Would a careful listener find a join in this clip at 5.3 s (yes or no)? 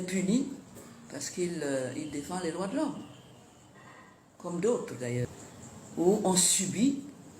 yes